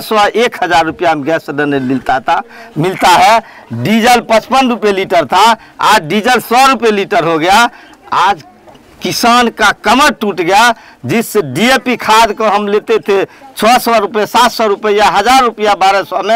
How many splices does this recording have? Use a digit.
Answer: 0